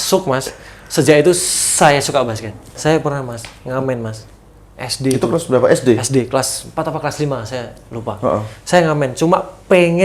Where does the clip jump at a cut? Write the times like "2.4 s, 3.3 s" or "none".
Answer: 2.8 s